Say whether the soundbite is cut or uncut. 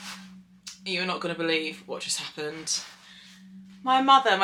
uncut